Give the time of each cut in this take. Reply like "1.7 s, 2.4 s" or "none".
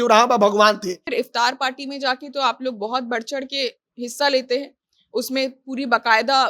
1.0 s